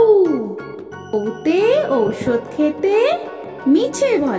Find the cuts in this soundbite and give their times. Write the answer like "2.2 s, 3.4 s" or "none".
1.1 s